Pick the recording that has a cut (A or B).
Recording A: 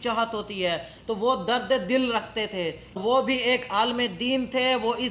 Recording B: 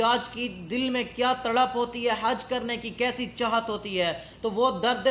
A